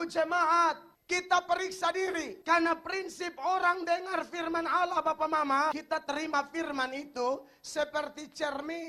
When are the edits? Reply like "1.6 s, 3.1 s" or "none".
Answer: 2.3 s, 5.8 s